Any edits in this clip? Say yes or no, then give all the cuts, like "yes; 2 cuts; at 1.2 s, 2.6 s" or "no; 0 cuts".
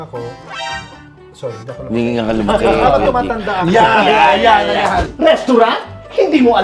yes; 1 cut; at 5.0 s